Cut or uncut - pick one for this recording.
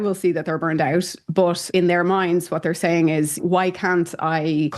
uncut